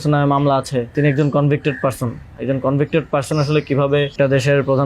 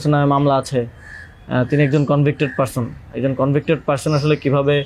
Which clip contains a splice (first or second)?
first